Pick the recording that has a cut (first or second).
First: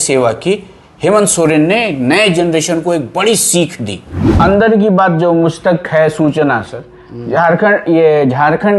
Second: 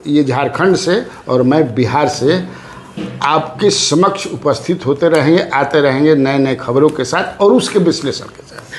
first